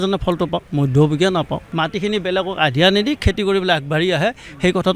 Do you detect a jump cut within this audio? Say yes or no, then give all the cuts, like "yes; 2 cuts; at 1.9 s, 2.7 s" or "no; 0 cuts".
yes; 1 cut; at 1.6 s